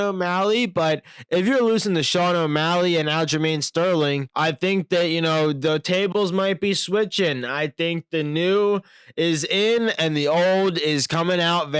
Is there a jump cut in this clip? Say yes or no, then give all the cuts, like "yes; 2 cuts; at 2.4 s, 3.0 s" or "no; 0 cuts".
no; 0 cuts